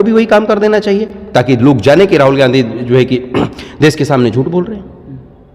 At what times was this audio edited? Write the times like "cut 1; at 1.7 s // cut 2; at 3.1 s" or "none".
none